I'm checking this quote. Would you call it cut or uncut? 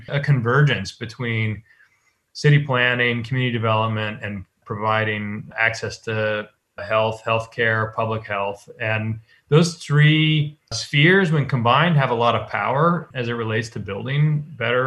uncut